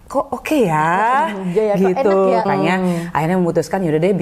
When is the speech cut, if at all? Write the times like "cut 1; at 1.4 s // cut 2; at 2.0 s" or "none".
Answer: cut 1; at 2.5 s